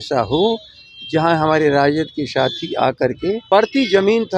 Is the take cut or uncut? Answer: cut